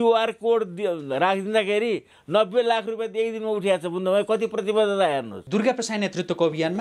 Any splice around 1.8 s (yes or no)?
no